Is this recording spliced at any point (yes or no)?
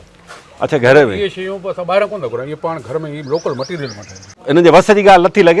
yes